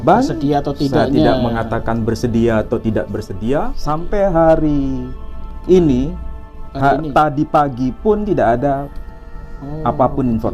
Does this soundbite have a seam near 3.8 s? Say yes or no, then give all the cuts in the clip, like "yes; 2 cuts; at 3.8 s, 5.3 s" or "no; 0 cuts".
yes; 1 cut; at 3.8 s